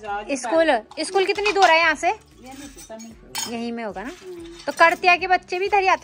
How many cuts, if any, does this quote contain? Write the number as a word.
zero